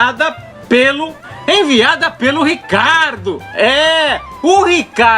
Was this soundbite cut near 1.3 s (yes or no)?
yes